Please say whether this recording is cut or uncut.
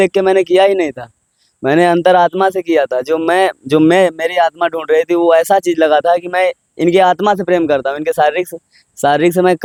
uncut